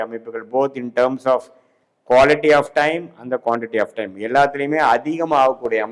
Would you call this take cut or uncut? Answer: uncut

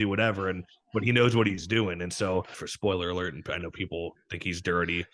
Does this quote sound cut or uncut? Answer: cut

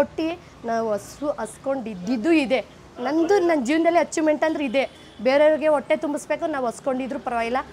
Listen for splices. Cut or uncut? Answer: uncut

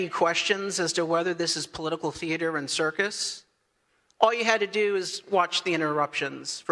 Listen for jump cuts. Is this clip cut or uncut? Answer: uncut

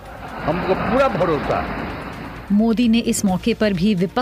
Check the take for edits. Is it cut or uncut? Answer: uncut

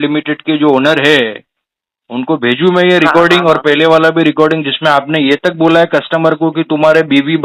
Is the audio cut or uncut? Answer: uncut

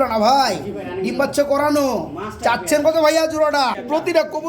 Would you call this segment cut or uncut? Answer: cut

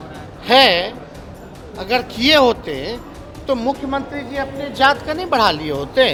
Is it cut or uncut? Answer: uncut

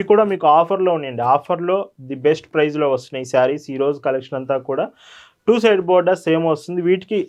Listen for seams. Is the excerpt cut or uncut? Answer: uncut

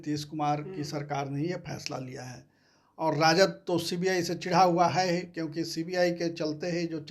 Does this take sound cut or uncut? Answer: uncut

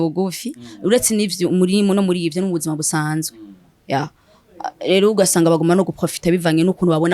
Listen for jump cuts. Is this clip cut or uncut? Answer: uncut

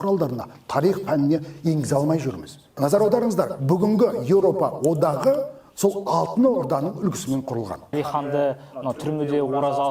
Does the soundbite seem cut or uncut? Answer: cut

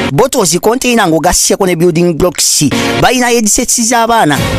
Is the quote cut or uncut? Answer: uncut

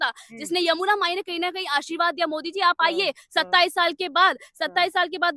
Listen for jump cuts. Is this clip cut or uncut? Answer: uncut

